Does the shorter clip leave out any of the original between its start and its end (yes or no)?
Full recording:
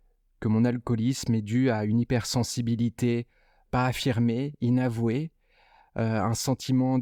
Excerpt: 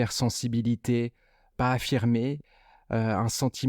yes